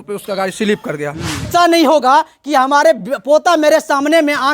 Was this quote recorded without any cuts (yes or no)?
no